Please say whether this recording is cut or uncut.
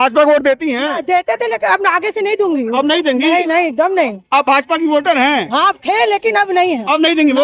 uncut